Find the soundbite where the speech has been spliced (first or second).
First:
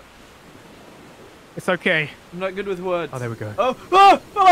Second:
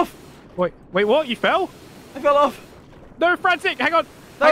first